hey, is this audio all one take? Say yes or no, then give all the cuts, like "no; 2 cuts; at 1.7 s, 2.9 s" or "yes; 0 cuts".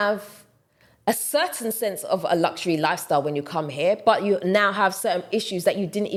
yes; 0 cuts